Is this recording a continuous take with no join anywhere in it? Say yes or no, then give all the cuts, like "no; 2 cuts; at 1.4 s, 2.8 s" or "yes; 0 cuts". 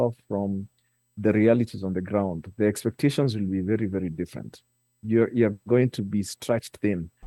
yes; 0 cuts